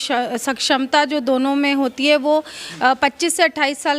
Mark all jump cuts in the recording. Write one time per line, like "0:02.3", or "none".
none